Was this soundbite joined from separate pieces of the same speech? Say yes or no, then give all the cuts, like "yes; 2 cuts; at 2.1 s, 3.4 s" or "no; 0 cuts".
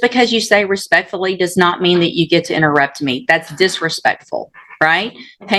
no; 0 cuts